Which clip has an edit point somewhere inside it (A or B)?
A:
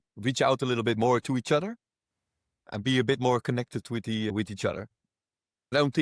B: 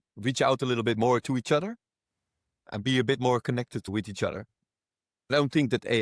B